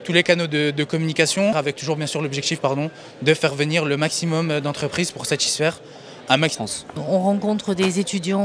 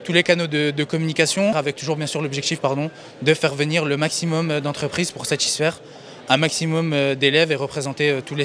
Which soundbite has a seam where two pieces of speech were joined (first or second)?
second